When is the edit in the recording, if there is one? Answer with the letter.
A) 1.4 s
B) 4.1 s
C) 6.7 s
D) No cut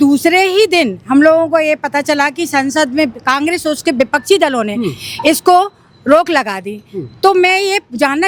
D